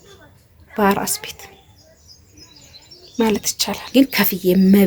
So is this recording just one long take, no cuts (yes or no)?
no